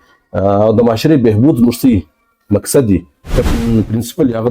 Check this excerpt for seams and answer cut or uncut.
cut